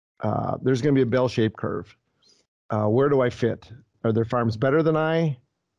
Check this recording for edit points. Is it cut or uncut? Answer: cut